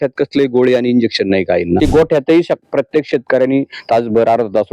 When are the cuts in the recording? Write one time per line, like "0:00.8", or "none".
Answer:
0:01.8